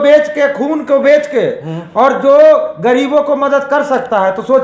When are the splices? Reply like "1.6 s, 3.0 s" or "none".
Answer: none